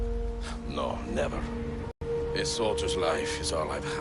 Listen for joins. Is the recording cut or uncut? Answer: cut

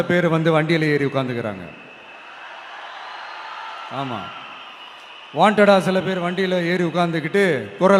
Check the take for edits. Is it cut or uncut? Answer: uncut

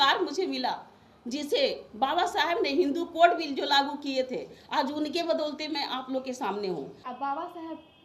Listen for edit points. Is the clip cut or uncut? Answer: cut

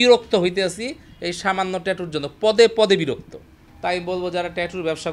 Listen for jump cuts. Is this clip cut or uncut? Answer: uncut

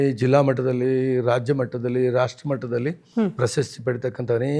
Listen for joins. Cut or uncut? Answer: uncut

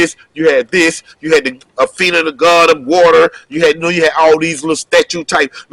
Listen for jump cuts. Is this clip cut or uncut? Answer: uncut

